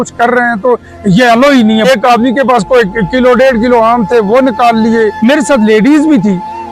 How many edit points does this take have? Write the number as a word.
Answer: two